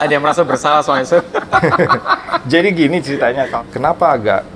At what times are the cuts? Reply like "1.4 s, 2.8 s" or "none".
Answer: 3.5 s

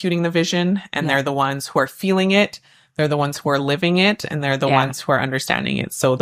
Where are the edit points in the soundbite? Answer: none

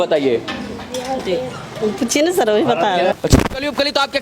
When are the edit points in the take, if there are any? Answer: 3.1 s

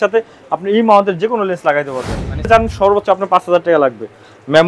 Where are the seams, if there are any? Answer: 2.5 s

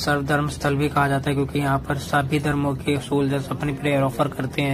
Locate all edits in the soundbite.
none

